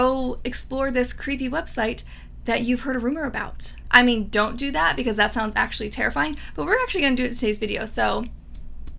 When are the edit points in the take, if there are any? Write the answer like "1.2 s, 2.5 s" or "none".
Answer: none